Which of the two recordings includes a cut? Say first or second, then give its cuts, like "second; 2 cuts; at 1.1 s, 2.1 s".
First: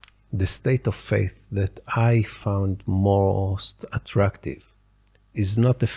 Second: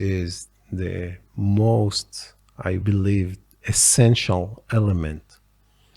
second; 1 cut; at 2.8 s